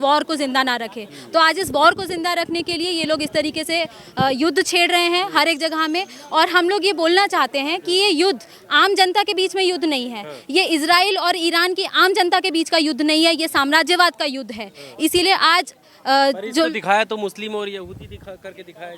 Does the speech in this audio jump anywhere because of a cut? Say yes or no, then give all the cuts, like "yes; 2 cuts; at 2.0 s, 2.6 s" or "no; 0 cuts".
no; 0 cuts